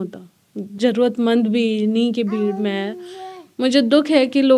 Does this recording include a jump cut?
no; 0 cuts

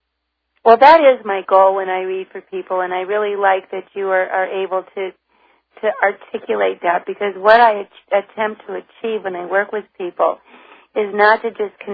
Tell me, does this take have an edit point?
yes; 1 cut; at 3.3 s

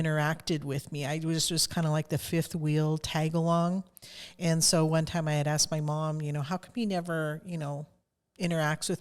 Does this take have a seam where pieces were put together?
no; 0 cuts

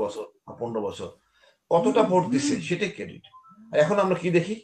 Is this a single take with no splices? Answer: yes; 0 cuts

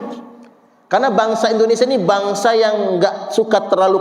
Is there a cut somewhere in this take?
no; 0 cuts

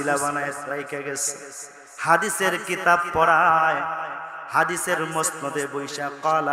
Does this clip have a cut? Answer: no; 0 cuts

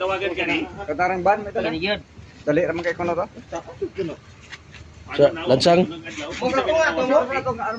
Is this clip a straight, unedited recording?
yes; 0 cuts

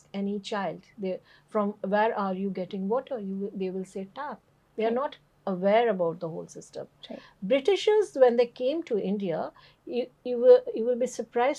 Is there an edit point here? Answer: no; 0 cuts

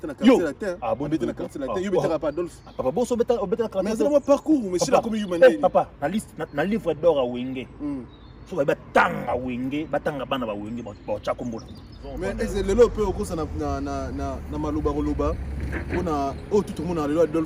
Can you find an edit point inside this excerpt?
yes; 1 cut; at 12.2 s

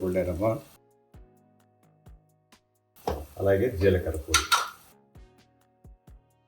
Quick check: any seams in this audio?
yes; 1 cut; at 2.9 s

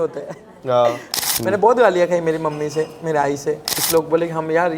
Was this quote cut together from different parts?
yes; 2 cuts; at 1.1 s, 3.7 s

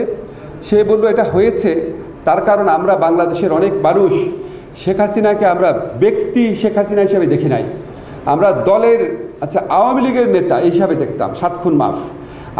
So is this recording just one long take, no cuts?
yes; 0 cuts

